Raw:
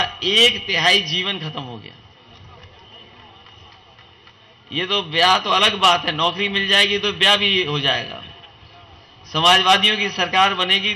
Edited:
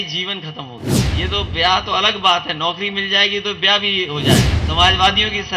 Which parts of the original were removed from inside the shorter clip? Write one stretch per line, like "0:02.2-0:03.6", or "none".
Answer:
0:02.0-0:04.6
0:08.1-0:09.2